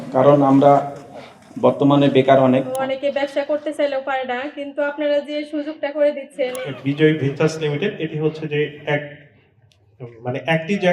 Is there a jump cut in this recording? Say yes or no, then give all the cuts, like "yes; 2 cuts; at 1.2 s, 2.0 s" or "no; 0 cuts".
yes; 2 cuts; at 2.7 s, 6.6 s